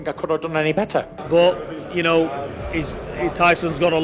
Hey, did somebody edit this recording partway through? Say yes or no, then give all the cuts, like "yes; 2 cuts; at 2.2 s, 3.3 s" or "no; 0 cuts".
yes; 1 cut; at 1.2 s